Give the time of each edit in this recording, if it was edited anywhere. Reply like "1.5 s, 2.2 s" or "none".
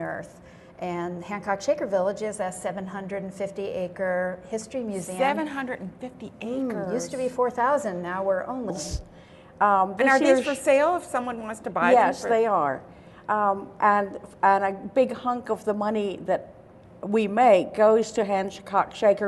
none